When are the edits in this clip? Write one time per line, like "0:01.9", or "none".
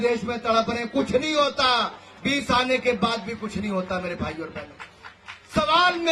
none